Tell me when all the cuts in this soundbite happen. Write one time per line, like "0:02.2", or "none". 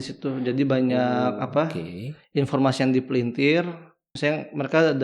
0:04.1